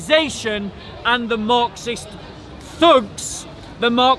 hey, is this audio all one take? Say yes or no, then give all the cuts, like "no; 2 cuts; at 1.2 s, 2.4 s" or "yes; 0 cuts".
yes; 0 cuts